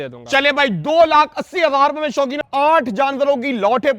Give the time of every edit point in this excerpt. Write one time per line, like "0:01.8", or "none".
0:02.4